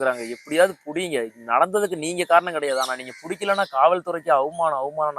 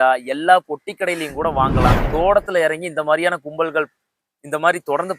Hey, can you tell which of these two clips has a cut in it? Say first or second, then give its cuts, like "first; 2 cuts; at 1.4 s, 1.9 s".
second; 1 cut; at 2.0 s